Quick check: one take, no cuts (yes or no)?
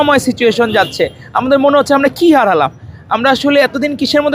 yes